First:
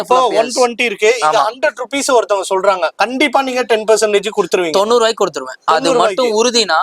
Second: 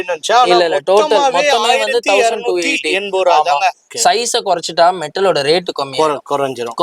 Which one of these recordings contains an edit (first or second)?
second